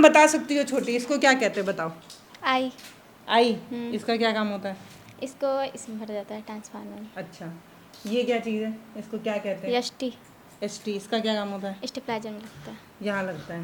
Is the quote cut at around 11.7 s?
no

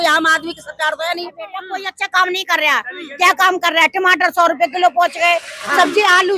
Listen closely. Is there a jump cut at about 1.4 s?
yes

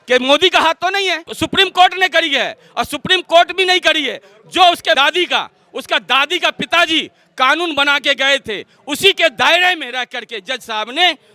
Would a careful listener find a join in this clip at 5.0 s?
yes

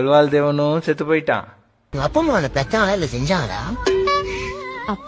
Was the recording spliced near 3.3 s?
no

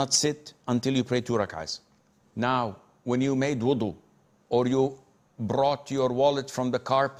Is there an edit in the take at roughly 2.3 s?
no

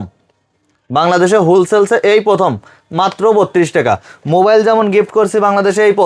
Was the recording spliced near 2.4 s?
no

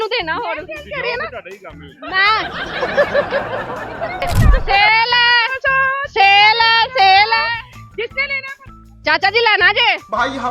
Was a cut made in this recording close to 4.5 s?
yes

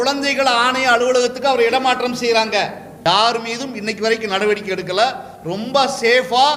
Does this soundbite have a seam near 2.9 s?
yes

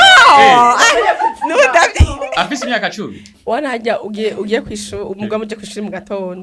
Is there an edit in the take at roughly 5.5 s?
no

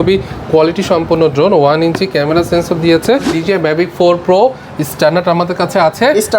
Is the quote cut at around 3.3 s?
yes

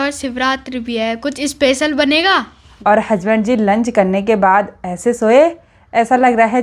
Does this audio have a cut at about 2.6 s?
yes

